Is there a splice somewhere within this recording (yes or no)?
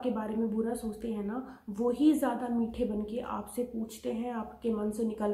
no